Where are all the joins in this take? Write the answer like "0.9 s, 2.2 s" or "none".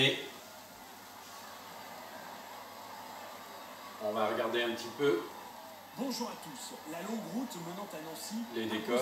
3.0 s